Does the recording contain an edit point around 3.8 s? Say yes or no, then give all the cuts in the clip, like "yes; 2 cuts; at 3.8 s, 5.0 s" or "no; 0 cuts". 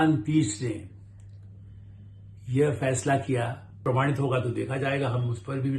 yes; 1 cut; at 3.8 s